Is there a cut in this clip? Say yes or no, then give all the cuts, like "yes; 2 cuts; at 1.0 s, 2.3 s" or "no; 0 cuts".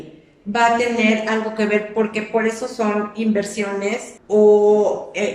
yes; 1 cut; at 4.1 s